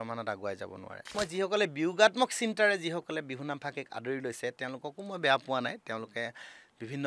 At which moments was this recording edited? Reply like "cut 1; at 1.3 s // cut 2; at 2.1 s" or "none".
cut 1; at 1.1 s